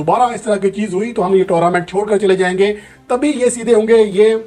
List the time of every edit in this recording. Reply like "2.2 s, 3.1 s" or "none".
none